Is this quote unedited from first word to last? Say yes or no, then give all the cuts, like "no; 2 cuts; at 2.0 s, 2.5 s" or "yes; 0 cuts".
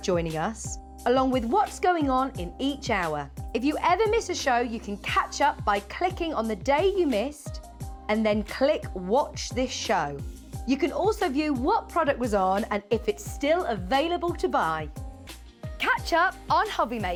yes; 0 cuts